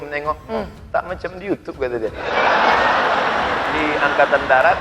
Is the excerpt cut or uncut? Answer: cut